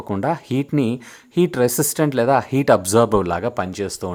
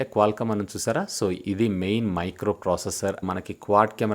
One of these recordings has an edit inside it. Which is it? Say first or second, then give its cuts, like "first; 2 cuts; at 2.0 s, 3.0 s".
second; 1 cut; at 3.2 s